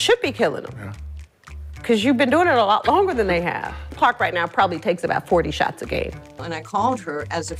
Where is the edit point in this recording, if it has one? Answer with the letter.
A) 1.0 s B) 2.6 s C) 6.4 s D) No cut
C